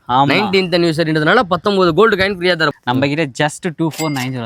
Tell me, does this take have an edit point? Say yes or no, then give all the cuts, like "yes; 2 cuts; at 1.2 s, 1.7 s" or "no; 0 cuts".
yes; 1 cut; at 2.7 s